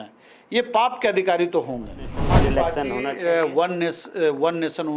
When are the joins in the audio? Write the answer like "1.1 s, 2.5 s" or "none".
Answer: 2.1 s